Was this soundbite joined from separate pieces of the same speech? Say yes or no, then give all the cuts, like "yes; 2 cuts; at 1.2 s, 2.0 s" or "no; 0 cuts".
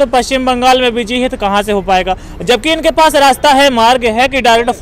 no; 0 cuts